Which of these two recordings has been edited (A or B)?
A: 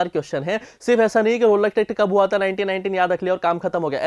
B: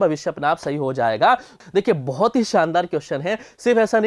B